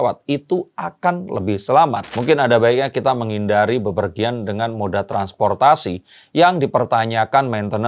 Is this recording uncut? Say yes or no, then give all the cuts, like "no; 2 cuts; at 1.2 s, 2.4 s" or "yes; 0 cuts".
no; 1 cut; at 2.1 s